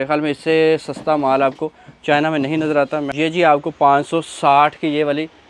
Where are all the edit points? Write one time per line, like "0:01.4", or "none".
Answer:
0:03.1